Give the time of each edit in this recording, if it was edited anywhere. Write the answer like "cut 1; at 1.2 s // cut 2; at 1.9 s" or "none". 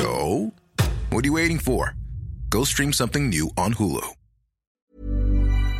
cut 1; at 4.7 s